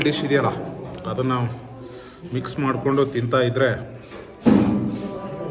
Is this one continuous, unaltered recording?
yes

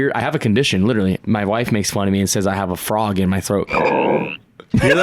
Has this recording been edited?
yes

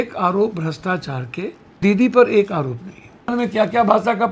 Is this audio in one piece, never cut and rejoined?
no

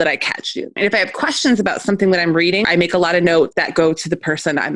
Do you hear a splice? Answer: yes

